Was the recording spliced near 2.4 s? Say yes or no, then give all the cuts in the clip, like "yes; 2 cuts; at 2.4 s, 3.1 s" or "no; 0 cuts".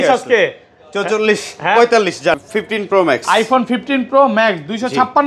yes; 1 cut; at 2.4 s